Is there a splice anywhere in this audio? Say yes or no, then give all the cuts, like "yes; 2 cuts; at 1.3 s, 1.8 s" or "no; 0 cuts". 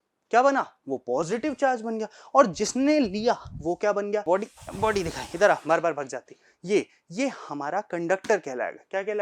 yes; 1 cut; at 4.2 s